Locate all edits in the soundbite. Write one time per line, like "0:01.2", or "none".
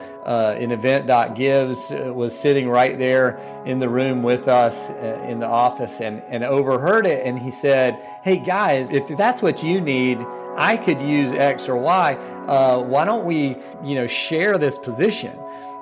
0:08.9
0:13.7